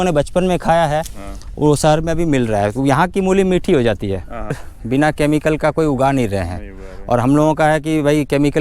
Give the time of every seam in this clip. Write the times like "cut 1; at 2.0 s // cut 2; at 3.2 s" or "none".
cut 1; at 4.6 s